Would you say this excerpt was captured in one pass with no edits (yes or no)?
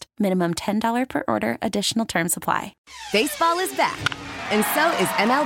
no